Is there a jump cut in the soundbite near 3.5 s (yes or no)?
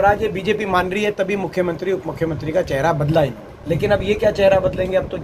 yes